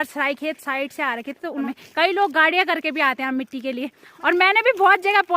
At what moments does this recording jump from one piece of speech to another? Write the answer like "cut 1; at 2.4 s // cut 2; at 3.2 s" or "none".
cut 1; at 1.7 s // cut 2; at 4.0 s